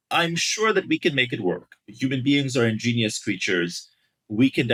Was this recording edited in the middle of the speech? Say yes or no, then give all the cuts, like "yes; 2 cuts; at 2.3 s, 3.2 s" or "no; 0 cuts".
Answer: no; 0 cuts